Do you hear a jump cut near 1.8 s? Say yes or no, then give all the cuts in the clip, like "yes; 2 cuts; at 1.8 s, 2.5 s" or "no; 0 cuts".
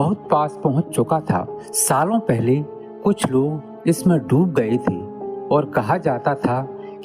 yes; 1 cut; at 1.8 s